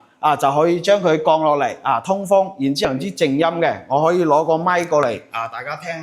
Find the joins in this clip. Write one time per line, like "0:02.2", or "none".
0:02.8

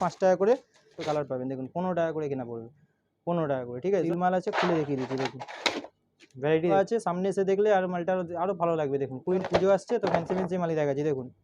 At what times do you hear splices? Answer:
0:01.0
0:04.1
0:06.7
0:09.4

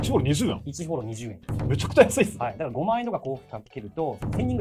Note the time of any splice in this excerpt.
none

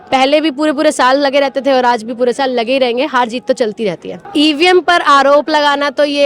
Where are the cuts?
0:04.1

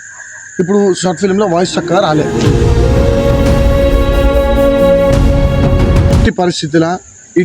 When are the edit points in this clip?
0:02.3
0:06.2

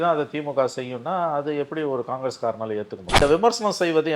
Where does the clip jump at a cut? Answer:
0:03.2

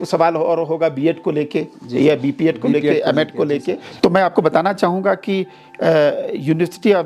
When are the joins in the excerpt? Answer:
0:03.9

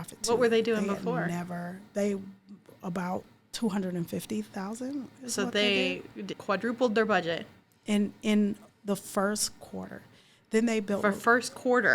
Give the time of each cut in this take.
0:06.3

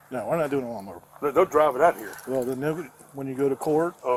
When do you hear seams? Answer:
none

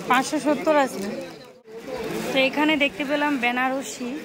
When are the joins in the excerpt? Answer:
0:01.5

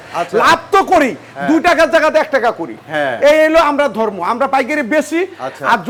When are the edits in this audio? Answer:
none

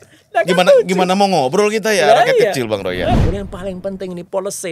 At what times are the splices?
0:03.2

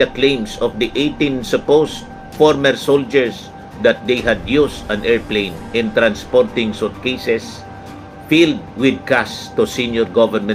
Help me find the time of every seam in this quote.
none

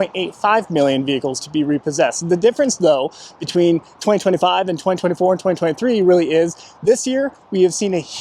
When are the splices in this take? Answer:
none

